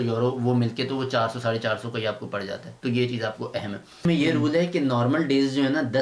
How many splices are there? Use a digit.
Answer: 1